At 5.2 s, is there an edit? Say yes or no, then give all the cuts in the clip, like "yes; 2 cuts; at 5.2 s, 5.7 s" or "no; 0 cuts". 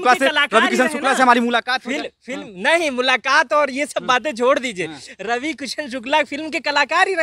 no; 0 cuts